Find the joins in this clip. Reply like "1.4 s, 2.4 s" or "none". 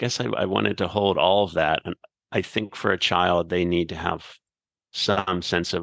none